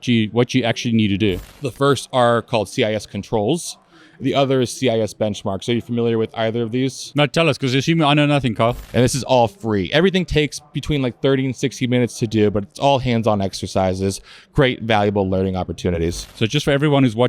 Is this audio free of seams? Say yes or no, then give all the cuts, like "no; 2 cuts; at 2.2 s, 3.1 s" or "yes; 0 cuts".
no; 3 cuts; at 1.5 s, 8.8 s, 16.3 s